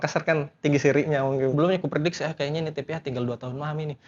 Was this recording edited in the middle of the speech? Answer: yes; 1 cut; at 1.5 s

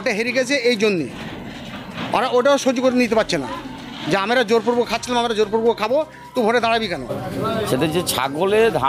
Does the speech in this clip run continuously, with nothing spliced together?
no; 1 cut; at 7.2 s

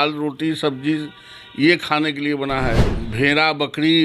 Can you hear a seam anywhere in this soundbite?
yes; 1 cut; at 3.0 s

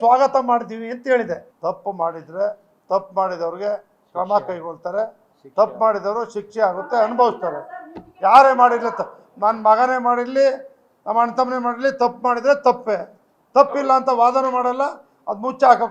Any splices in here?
yes; 1 cut; at 1.5 s

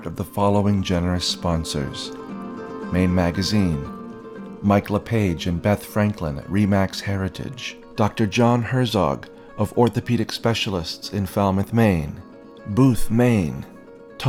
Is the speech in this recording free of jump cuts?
yes; 0 cuts

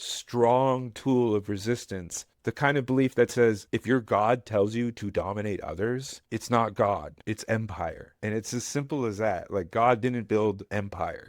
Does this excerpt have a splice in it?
yes; 1 cut; at 2.3 s

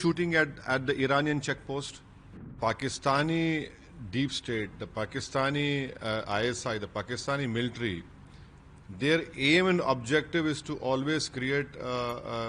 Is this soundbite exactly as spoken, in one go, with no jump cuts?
no; 1 cut; at 2.6 s

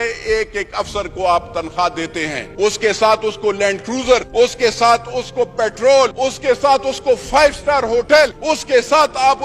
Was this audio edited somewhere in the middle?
yes; 4 cuts; at 2.4 s, 4.3 s, 6.1 s, 8.4 s

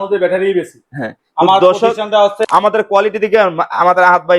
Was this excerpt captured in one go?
no; 1 cut; at 2.4 s

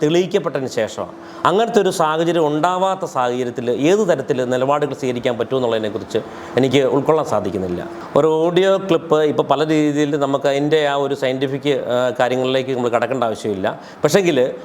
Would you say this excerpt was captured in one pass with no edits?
yes; 0 cuts

